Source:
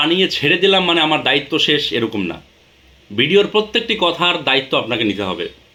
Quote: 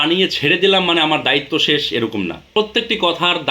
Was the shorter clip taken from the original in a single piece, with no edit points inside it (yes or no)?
no